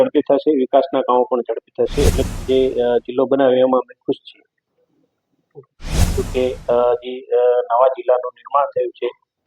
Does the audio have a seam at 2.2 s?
yes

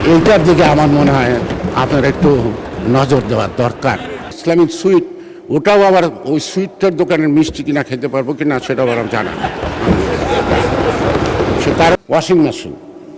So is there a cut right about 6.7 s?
no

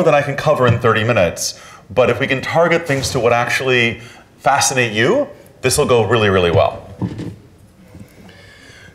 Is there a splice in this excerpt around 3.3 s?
no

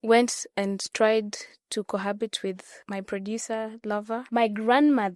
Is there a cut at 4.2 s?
yes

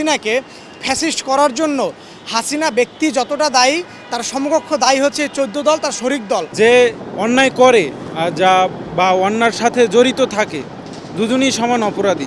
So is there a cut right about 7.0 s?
yes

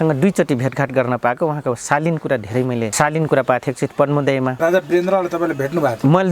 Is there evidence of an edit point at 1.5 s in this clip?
no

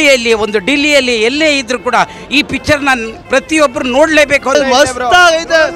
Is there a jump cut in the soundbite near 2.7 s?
no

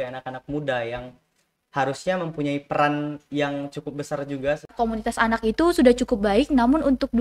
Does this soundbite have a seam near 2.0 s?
no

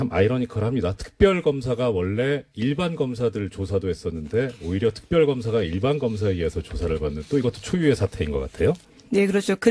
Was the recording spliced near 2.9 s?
no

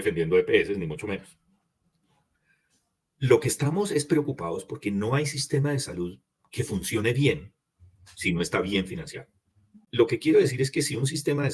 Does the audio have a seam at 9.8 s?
yes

